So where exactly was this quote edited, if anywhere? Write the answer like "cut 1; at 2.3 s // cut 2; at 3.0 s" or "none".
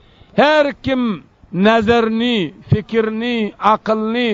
none